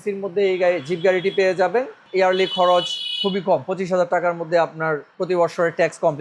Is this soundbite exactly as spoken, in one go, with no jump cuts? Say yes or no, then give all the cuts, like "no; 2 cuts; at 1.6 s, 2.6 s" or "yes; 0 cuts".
no; 2 cuts; at 2.0 s, 5.1 s